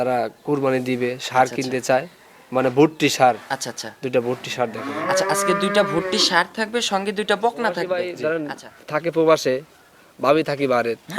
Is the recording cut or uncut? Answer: cut